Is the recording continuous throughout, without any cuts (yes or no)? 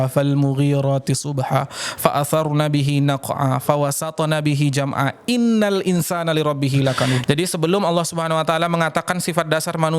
no